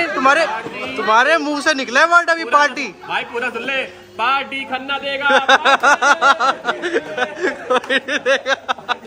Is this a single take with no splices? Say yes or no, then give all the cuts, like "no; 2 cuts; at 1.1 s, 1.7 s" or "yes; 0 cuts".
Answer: yes; 0 cuts